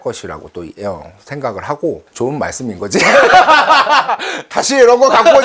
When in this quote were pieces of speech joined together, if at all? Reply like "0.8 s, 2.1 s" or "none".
2.1 s